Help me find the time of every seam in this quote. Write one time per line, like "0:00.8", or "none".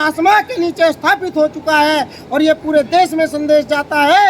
none